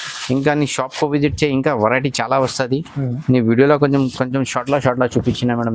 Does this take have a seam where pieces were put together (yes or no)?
no